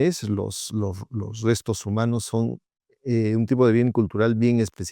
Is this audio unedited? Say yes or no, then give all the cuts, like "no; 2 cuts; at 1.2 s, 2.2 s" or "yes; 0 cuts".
yes; 0 cuts